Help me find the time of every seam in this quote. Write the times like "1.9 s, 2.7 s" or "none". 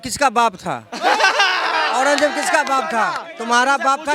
none